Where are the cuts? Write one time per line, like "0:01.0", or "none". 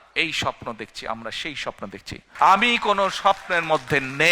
0:02.3